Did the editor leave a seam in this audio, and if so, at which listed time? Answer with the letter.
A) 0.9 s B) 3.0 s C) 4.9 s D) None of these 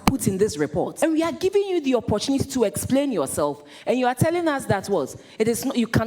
A